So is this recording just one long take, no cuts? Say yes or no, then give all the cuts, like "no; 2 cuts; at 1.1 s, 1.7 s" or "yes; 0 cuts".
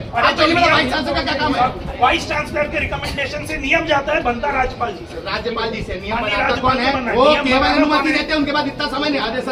yes; 0 cuts